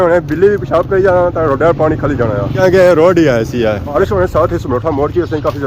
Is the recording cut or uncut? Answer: cut